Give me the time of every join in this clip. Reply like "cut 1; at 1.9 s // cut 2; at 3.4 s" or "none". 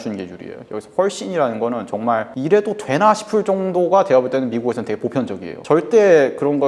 cut 1; at 5.6 s